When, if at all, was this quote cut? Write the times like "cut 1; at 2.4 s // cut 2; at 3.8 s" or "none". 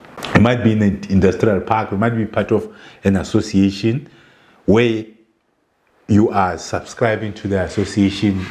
none